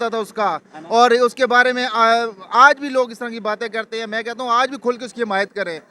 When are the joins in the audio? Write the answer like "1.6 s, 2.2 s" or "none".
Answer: none